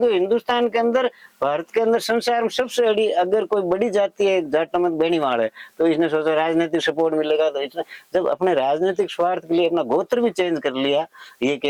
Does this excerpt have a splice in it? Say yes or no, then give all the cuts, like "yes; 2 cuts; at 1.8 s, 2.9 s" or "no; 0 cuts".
no; 0 cuts